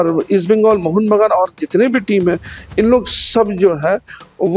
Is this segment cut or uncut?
uncut